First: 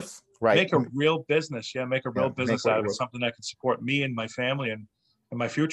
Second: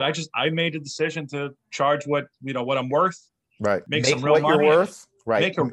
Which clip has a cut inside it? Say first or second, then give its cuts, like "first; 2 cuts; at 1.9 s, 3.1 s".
second; 2 cuts; at 1.5 s, 3.9 s